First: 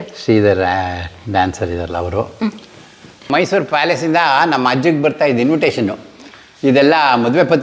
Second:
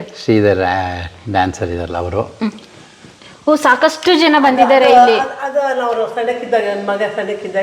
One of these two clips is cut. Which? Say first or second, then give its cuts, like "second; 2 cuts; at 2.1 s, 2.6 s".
first; 1 cut; at 3.3 s